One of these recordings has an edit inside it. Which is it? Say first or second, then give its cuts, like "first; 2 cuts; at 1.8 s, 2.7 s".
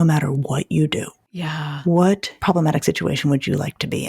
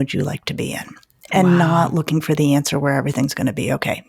first; 2 cuts; at 1.2 s, 2.3 s